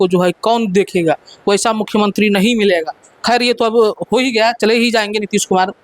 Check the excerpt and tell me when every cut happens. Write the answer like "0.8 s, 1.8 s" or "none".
none